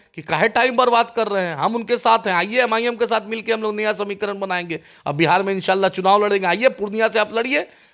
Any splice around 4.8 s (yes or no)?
no